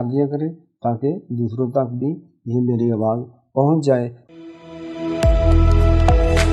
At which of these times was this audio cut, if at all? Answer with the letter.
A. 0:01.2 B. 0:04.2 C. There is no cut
B